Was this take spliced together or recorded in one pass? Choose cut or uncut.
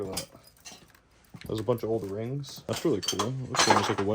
cut